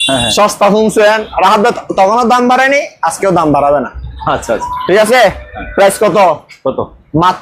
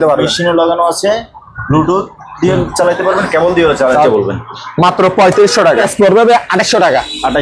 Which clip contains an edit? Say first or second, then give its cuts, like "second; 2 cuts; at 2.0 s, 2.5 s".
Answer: second; 2 cuts; at 4.1 s, 5.6 s